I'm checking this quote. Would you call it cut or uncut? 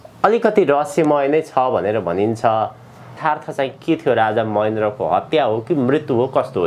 cut